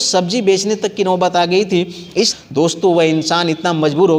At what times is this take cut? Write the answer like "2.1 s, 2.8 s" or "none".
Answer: 2.3 s